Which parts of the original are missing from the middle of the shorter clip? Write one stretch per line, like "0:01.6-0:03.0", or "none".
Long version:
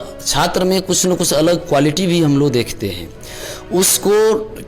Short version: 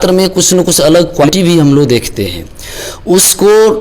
0:01.8-0:01.9

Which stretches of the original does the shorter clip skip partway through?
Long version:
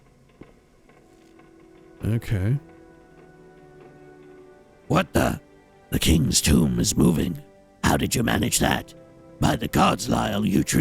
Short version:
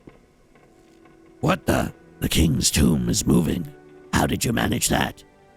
0:01.7-0:04.9
0:05.5-0:05.7

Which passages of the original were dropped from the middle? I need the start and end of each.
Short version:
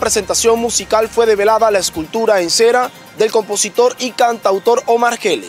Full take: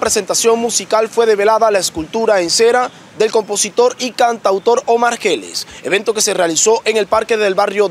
none

